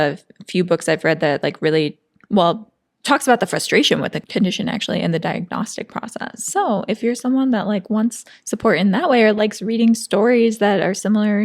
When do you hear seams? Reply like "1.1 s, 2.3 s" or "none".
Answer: 4.2 s